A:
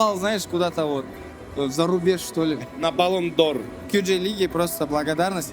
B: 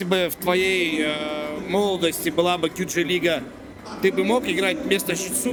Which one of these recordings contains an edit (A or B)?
A